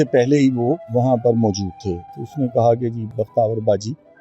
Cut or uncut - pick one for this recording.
cut